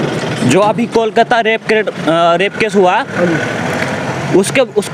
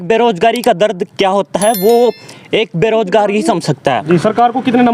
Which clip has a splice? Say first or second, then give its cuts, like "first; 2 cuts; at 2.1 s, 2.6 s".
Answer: second; 1 cut; at 4.0 s